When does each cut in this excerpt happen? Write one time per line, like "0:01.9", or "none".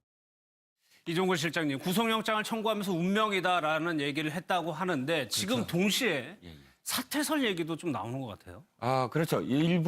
0:06.2